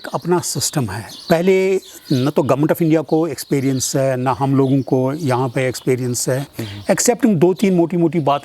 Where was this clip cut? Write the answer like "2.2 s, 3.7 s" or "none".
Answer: 6.5 s